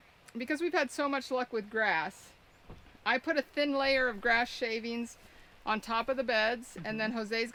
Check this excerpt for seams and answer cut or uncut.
uncut